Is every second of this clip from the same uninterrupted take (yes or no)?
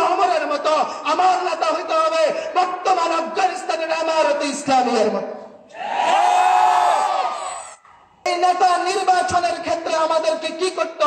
no